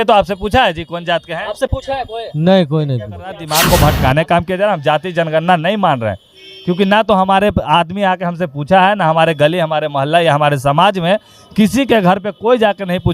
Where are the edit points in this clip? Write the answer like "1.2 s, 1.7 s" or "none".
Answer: 3.5 s